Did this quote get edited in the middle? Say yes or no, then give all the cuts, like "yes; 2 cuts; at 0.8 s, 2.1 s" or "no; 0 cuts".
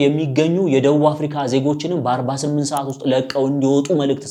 no; 0 cuts